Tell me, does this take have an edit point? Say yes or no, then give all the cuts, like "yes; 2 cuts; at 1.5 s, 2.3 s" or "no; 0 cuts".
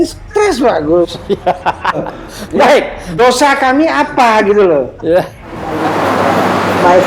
yes; 2 cuts; at 2.0 s, 5.7 s